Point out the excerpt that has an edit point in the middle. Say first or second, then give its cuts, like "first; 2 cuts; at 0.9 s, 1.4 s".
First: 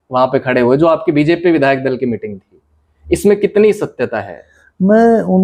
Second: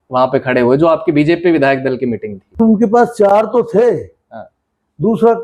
second; 1 cut; at 2.6 s